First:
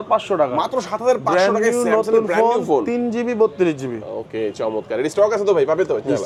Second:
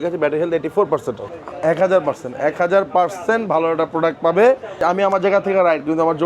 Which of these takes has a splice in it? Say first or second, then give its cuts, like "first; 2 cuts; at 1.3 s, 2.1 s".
second; 2 cuts; at 1.3 s, 4.8 s